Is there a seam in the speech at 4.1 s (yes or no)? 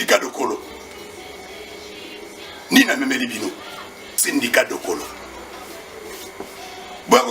yes